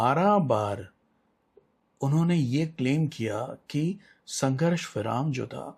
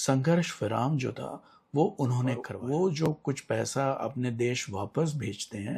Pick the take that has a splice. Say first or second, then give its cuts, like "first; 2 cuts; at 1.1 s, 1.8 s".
second; 1 cut; at 2.5 s